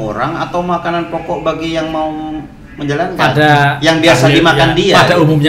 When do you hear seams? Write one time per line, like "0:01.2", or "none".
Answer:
none